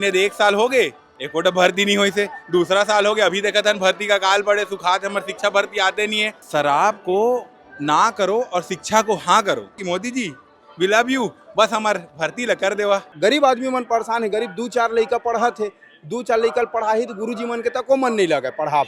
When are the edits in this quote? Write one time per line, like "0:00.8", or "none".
0:06.4
0:09.8
0:13.1

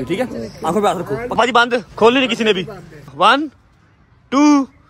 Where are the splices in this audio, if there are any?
0:01.4
0:03.1

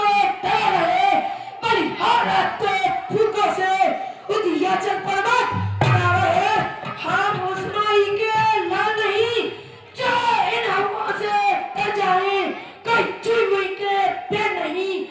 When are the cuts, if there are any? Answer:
none

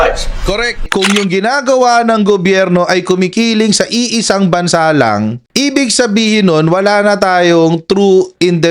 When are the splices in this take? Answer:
0:00.8
0:05.4

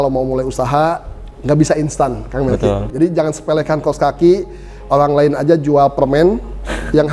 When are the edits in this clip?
0:02.9

